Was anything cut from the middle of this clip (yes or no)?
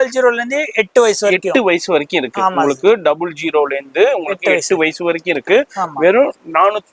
no